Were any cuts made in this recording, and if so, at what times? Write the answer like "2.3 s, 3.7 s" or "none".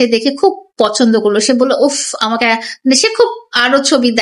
none